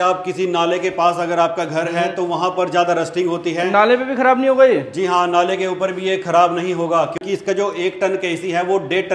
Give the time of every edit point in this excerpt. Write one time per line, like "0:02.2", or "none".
0:07.2